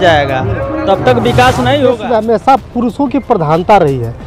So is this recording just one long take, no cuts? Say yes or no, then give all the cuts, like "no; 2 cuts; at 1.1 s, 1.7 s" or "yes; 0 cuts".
no; 1 cut; at 1.9 s